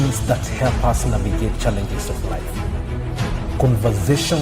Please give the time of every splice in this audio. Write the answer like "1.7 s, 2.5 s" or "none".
none